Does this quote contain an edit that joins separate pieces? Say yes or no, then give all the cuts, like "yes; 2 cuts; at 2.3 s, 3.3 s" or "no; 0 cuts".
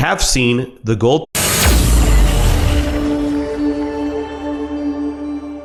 no; 0 cuts